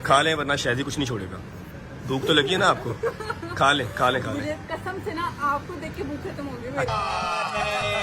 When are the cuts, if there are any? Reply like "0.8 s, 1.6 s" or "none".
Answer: none